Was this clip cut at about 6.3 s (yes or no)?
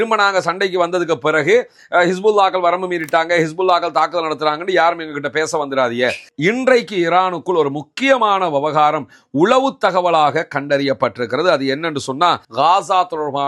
yes